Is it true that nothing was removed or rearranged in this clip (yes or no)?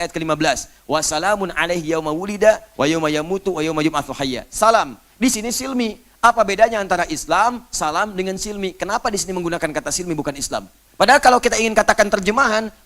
no